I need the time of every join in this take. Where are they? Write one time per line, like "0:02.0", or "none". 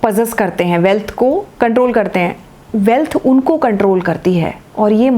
0:01.5